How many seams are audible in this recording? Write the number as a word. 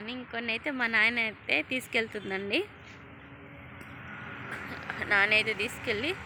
zero